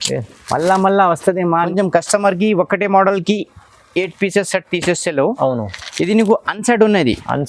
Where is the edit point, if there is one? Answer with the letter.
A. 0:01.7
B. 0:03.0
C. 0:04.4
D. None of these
A